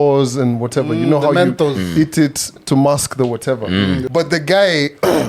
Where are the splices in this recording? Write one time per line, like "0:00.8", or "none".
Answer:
0:04.0